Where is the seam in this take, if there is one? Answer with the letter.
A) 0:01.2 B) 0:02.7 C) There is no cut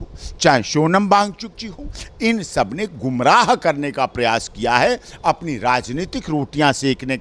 C